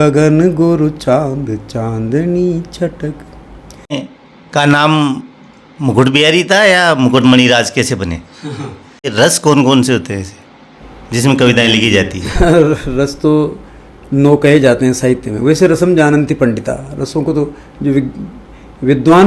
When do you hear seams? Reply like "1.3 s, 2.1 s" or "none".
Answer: 4.0 s, 9.0 s